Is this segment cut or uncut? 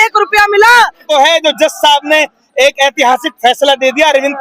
cut